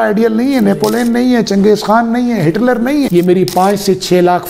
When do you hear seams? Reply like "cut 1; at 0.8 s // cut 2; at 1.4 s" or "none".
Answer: cut 1; at 3.1 s